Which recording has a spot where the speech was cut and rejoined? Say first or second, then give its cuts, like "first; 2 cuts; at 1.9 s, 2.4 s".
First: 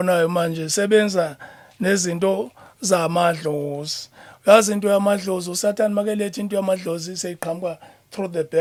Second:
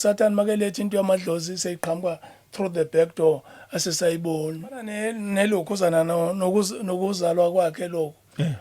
second; 1 cut; at 5.0 s